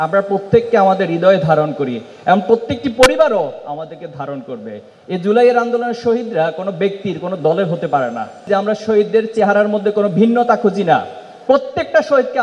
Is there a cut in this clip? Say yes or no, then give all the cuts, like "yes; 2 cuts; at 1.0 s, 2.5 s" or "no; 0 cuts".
yes; 1 cut; at 8.4 s